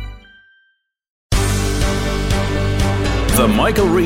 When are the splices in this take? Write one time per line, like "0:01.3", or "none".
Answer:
0:01.1